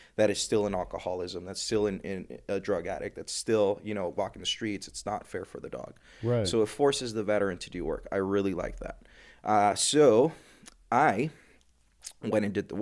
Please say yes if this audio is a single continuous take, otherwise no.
yes